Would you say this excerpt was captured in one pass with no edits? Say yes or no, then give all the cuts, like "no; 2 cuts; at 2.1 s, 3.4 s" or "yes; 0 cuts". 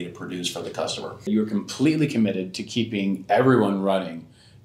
no; 1 cut; at 1.3 s